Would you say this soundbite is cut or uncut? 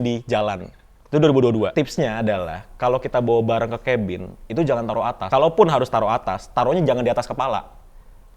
cut